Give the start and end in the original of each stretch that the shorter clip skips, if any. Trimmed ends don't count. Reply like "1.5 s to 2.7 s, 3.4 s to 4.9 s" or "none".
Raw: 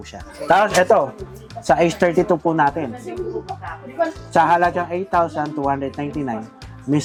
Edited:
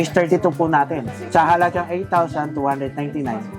3.0 s to 4.2 s